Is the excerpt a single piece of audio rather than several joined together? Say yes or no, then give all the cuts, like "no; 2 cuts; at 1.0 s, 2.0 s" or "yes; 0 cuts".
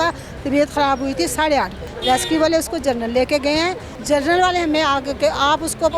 no; 2 cuts; at 1.8 s, 3.9 s